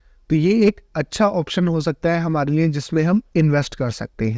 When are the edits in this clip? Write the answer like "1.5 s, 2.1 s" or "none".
none

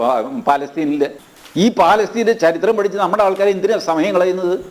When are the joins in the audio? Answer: 1.3 s

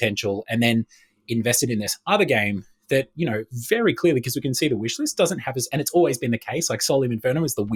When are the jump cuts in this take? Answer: none

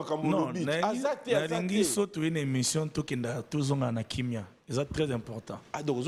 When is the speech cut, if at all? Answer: none

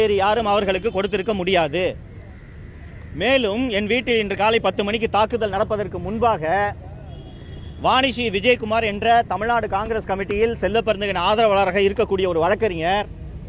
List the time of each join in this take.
none

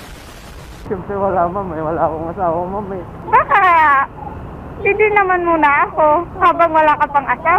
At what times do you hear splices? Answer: 0.8 s, 3.1 s

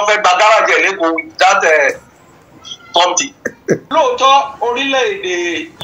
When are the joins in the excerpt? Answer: 3.8 s

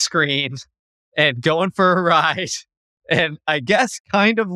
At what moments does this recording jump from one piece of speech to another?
none

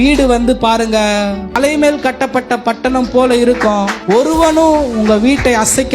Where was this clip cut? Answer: 1.6 s, 3.9 s

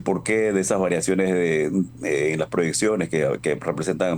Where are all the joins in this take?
none

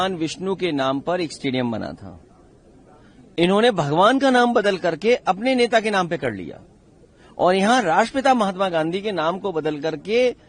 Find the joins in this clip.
none

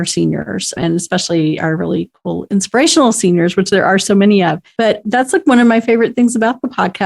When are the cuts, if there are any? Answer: 0.8 s, 4.9 s

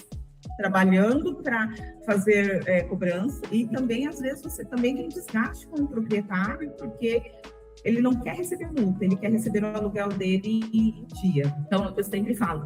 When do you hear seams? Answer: 3.5 s, 11.6 s

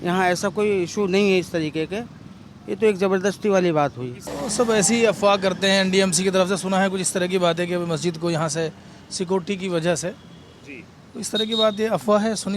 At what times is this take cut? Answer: 4.1 s

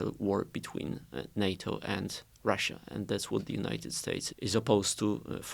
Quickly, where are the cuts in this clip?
4.3 s

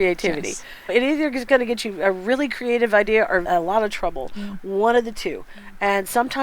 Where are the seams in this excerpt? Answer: 0.9 s, 3.5 s

